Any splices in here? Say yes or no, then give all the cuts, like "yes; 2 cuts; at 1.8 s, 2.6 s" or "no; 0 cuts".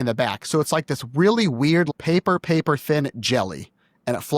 yes; 1 cut; at 1.9 s